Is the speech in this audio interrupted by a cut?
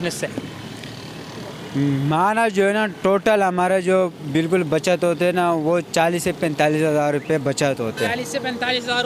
no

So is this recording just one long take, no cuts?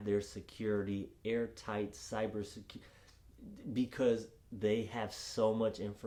yes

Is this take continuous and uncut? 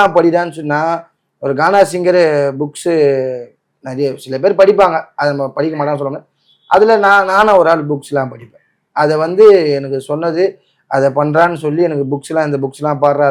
yes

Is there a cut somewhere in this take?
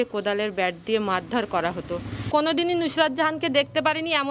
yes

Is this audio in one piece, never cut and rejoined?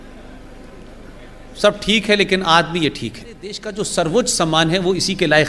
no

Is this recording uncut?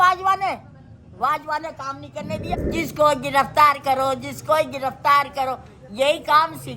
no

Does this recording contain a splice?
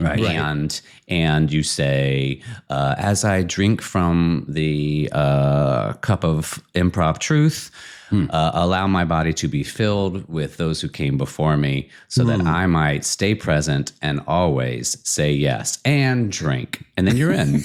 no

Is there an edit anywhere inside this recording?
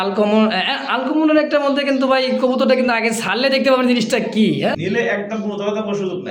yes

